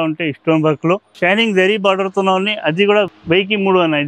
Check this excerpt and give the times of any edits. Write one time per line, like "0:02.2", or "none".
0:01.1
0:03.1

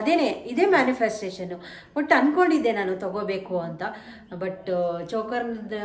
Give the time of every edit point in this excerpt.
none

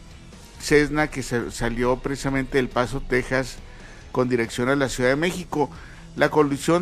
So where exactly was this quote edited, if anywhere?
none

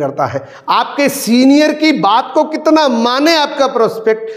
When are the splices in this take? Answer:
none

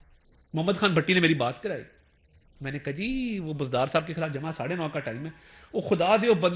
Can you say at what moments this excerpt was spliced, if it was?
none

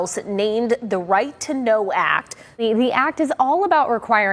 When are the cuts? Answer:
0:02.6

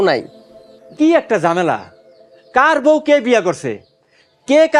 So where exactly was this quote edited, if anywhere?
none

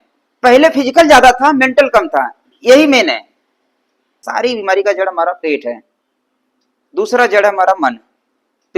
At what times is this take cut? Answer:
0:04.2

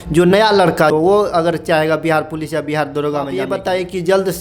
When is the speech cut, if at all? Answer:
0:00.9
0:03.5

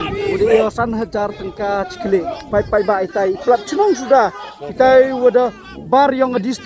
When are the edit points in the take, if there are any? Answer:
none

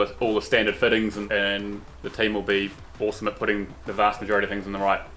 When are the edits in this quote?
0:01.2

